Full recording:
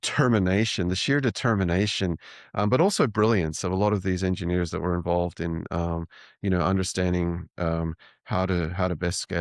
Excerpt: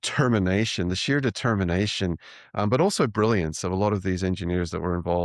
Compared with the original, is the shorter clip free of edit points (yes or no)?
yes